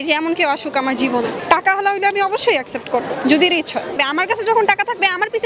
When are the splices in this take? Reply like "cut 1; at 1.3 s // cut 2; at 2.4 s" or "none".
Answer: cut 1; at 1.4 s // cut 2; at 3.9 s